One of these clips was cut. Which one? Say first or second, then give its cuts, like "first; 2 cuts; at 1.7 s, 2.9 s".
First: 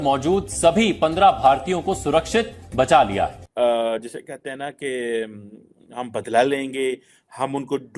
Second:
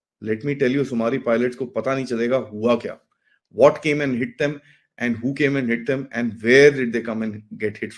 first; 1 cut; at 3.4 s